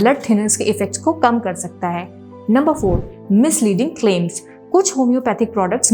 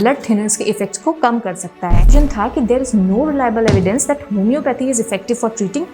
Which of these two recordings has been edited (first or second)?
second